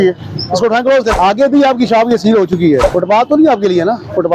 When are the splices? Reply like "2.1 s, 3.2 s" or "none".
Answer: 1.1 s, 2.8 s